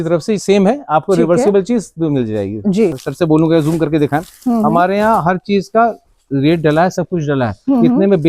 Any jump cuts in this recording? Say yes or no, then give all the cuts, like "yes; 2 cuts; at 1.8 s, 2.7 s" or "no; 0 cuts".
yes; 1 cut; at 3.0 s